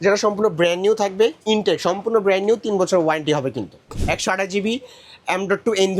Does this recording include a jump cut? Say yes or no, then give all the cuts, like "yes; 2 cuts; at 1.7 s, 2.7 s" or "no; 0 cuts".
yes; 1 cut; at 3.9 s